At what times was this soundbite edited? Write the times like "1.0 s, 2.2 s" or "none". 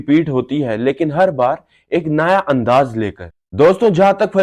3.2 s